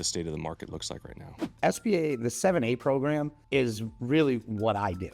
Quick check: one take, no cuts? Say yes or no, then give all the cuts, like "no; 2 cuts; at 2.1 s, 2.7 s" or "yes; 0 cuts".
no; 2 cuts; at 1.3 s, 3.4 s